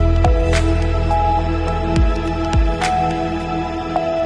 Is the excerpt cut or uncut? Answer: uncut